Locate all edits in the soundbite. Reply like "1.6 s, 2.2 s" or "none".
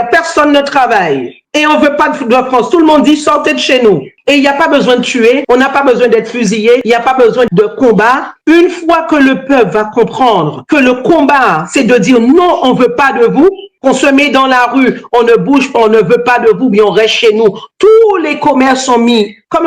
5.4 s, 6.8 s

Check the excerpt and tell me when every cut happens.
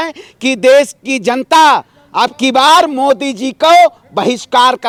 none

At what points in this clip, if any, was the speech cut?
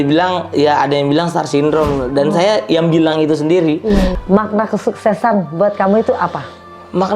4.1 s

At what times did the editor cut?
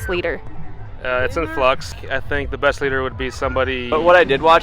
2.0 s, 3.8 s

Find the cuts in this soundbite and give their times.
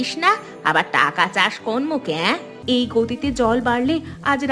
2.5 s

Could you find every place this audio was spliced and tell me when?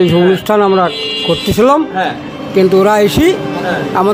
none

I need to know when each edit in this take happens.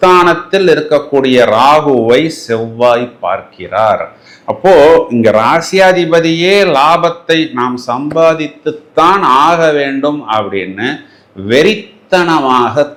none

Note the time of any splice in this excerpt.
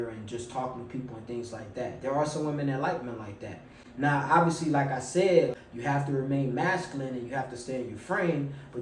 5.7 s

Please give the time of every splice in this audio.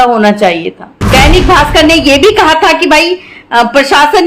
1.0 s

